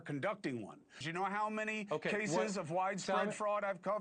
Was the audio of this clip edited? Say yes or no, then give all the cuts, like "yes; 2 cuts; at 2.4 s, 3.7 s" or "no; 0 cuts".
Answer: yes; 1 cut; at 1.0 s